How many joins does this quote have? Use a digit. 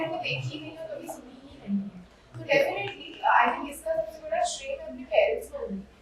0